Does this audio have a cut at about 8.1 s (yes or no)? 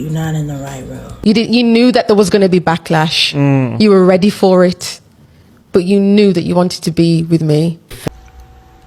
yes